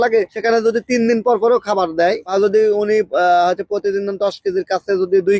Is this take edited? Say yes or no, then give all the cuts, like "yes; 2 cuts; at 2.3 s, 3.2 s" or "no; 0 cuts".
no; 0 cuts